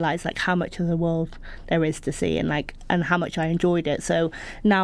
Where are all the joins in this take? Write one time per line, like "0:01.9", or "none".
none

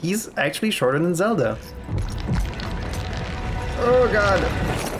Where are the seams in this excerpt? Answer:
0:01.7

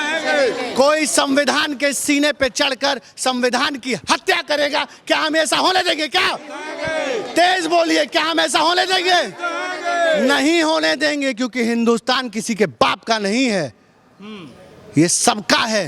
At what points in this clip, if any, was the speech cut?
none

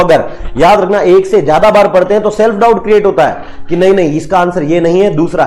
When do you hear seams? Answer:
none

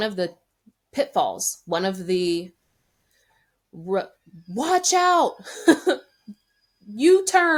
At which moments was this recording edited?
none

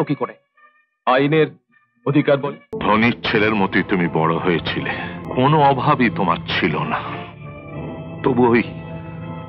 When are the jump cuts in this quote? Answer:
0:02.7
0:05.2

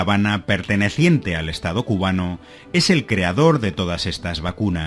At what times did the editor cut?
0:01.7

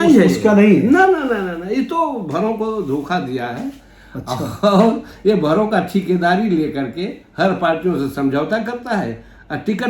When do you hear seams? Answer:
none

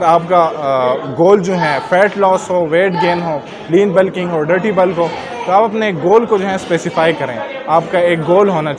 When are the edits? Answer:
none

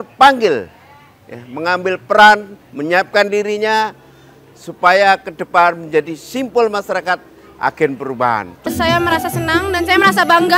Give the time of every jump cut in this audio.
0:08.6

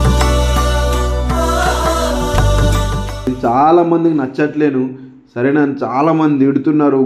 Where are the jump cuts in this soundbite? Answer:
0:03.3

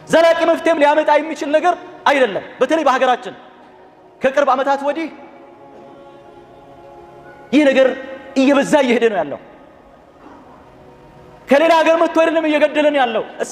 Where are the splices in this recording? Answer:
none

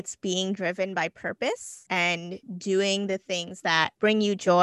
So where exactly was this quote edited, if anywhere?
0:02.1

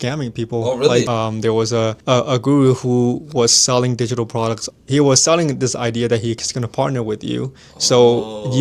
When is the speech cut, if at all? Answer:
0:01.1
0:02.0
0:04.7

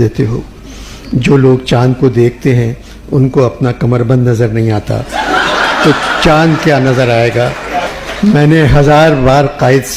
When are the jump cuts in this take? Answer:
0:07.9

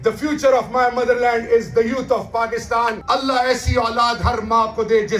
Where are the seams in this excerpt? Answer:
0:03.0

